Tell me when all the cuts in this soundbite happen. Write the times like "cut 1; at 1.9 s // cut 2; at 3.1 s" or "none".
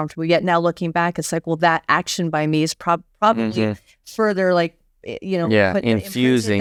none